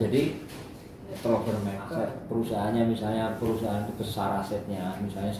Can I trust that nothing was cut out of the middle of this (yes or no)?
no